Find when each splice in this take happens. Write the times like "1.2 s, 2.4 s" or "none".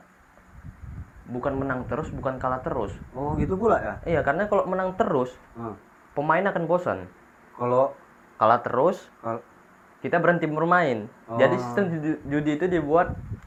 none